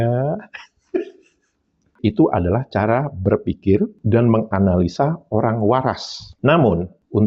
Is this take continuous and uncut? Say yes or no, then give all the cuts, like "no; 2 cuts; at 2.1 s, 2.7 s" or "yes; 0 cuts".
no; 1 cut; at 1.8 s